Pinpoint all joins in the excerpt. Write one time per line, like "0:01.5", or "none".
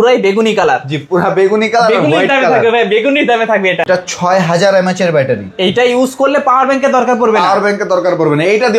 0:03.9